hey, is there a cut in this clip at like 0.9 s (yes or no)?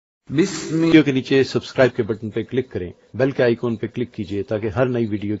yes